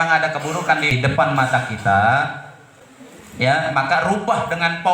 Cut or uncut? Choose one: cut